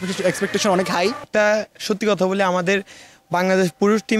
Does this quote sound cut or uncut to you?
cut